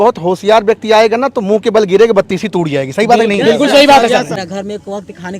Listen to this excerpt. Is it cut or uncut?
cut